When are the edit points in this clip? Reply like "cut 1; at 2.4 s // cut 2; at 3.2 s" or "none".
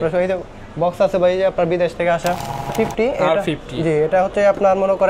cut 1; at 2.7 s